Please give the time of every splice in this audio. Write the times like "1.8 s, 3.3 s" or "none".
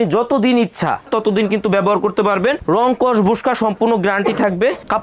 none